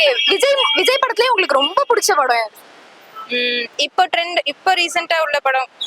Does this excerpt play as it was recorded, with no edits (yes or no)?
yes